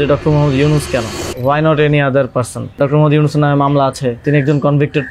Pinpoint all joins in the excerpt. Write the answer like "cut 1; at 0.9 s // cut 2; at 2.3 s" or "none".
cut 1; at 1.2 s // cut 2; at 2.8 s // cut 3; at 4.2 s

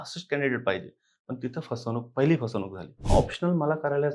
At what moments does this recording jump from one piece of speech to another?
cut 1; at 2.9 s

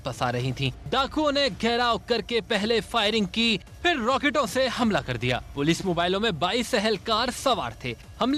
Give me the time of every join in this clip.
none

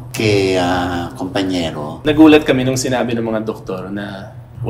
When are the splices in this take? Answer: cut 1; at 2.0 s

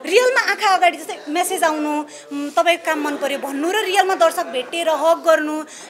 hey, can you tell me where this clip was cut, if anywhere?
none

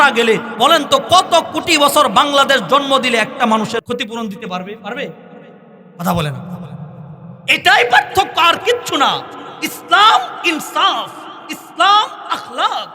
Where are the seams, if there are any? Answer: cut 1; at 3.8 s

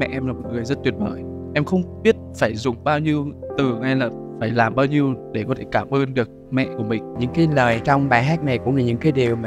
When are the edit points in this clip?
cut 1; at 7.1 s

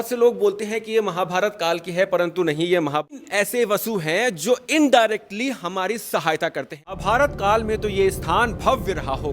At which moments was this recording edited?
cut 1; at 3.2 s // cut 2; at 6.9 s

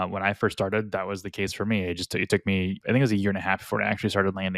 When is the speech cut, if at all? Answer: cut 1; at 2.8 s

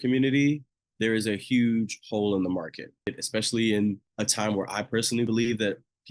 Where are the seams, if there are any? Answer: cut 1; at 3.2 s // cut 2; at 4.1 s // cut 3; at 5.3 s

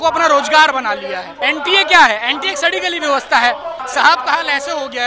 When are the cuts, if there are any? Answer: cut 1; at 1.3 s // cut 2; at 3.8 s

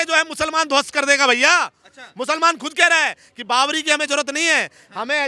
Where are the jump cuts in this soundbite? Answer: none

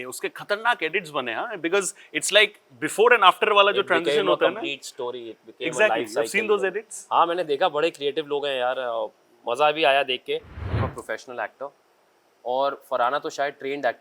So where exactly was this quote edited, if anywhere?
cut 1; at 10.9 s

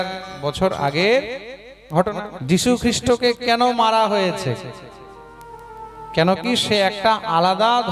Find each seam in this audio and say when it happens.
cut 1; at 2.3 s

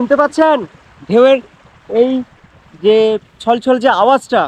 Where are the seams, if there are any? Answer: none

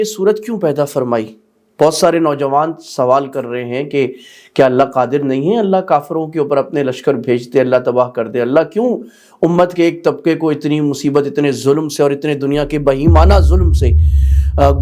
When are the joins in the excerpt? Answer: none

